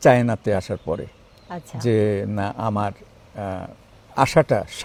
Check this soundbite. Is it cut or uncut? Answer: uncut